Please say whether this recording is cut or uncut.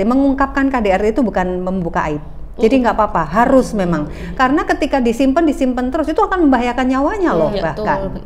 uncut